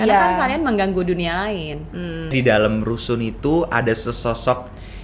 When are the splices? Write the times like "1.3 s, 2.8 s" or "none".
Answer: 2.3 s